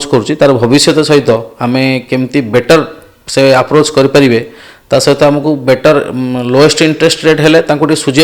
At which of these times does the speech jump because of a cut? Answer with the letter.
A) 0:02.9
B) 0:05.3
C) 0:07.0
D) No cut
D